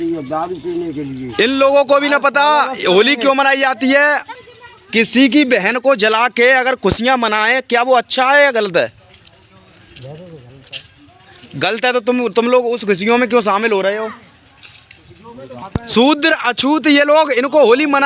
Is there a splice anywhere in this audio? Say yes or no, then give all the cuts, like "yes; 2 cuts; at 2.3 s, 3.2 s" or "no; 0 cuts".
yes; 3 cuts; at 1.3 s, 4.3 s, 15.6 s